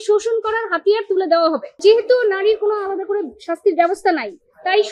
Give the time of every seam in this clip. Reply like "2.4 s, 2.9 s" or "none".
1.7 s